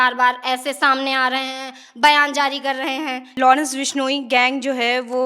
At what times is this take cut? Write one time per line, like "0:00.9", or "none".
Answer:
0:03.2